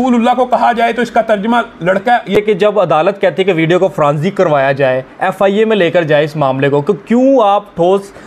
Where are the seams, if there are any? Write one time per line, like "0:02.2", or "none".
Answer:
0:02.3